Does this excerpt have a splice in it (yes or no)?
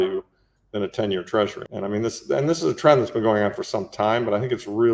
yes